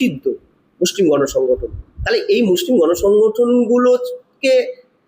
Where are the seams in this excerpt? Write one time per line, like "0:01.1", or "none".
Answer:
none